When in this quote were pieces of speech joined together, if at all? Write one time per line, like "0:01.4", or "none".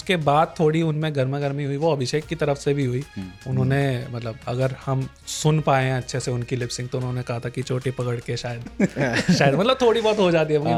none